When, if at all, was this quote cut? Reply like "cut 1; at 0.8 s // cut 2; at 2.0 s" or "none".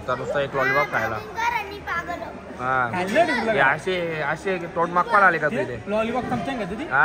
none